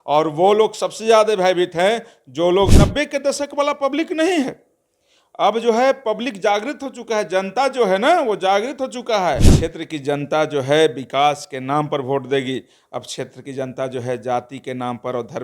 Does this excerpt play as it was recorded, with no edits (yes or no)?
no